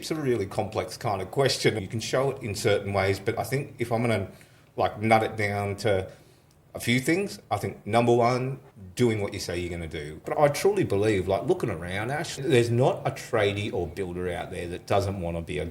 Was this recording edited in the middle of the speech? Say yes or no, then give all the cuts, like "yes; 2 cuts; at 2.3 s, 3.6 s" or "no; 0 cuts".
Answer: yes; 2 cuts; at 1.8 s, 10.2 s